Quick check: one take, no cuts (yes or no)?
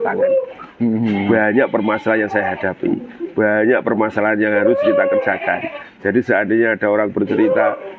yes